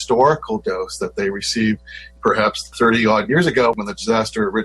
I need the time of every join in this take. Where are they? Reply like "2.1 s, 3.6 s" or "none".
3.7 s